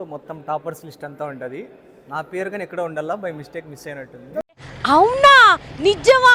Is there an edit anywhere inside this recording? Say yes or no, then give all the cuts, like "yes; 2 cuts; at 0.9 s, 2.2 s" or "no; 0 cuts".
no; 0 cuts